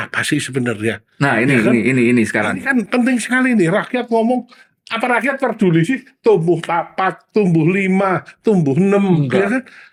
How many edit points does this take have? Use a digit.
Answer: 0